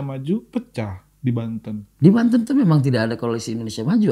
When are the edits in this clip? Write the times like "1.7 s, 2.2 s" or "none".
none